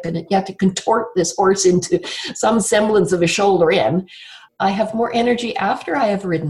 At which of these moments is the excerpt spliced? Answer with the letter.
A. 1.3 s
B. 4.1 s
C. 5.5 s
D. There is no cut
B